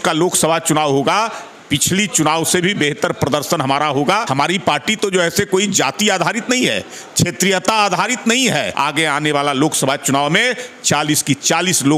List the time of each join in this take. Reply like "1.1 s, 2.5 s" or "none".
4.2 s, 8.7 s